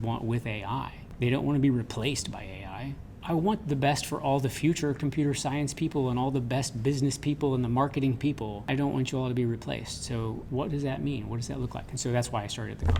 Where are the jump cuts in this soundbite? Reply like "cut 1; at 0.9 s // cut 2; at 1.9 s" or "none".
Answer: cut 1; at 1.0 s // cut 2; at 3.2 s // cut 3; at 8.7 s // cut 4; at 10.4 s